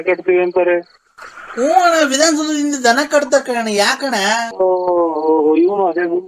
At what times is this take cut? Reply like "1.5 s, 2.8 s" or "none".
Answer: 4.5 s